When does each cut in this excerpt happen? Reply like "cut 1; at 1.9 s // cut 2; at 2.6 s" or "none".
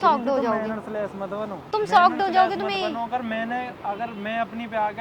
cut 1; at 1.6 s